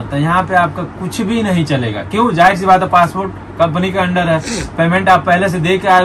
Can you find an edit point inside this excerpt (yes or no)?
no